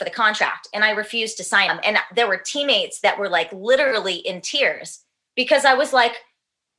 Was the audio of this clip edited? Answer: yes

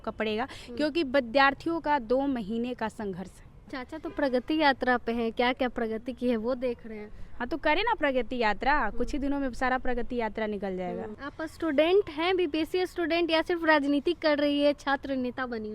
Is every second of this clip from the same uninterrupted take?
no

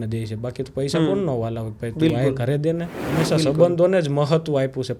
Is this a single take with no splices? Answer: no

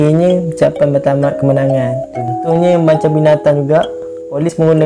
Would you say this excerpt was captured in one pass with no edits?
no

